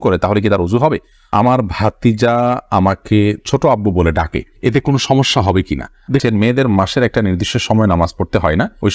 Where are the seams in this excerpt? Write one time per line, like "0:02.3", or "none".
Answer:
0:01.3
0:06.2